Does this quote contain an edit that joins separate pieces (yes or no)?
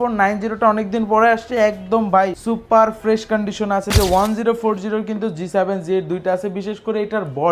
yes